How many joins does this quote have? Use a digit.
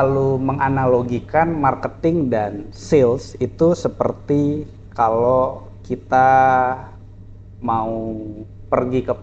0